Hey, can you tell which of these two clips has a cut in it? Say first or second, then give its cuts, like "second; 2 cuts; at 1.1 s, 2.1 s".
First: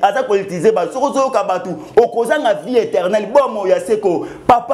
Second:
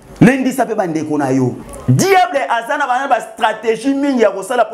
second; 1 cut; at 1.7 s